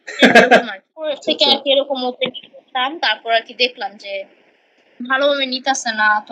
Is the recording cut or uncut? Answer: cut